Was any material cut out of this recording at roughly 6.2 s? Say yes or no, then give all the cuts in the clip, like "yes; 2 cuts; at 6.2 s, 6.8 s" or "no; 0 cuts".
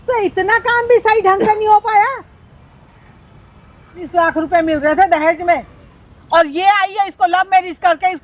no; 1 cut; at 4.1 s